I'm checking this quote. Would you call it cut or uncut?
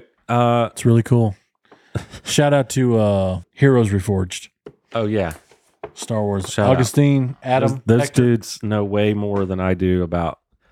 cut